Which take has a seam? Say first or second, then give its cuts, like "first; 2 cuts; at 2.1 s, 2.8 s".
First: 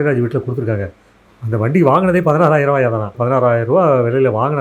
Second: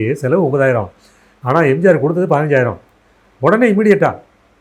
first; 1 cut; at 3.2 s